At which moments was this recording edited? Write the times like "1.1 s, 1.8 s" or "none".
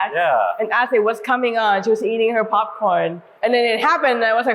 3.2 s

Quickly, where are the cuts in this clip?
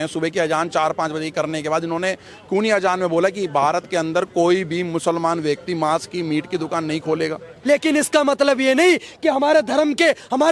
7.5 s

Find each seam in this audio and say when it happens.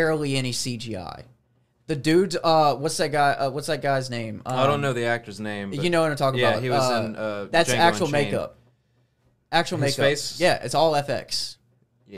none

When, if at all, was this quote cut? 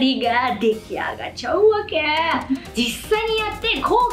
2.7 s

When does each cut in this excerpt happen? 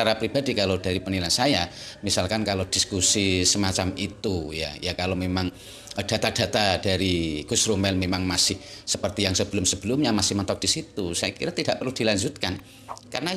none

